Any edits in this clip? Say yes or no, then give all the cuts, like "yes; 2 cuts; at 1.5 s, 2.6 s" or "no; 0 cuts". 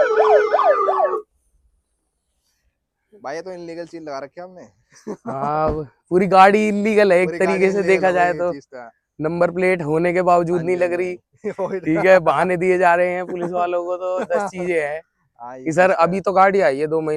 no; 0 cuts